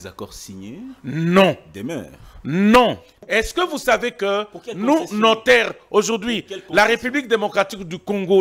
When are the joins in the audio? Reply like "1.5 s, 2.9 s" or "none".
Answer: 3.1 s